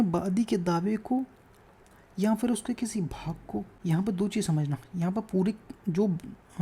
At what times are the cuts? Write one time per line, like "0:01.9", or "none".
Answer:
0:03.7